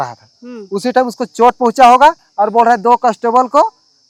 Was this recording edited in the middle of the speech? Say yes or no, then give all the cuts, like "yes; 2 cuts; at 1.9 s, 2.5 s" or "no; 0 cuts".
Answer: no; 0 cuts